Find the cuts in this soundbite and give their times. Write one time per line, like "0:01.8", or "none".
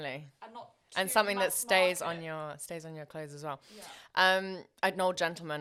none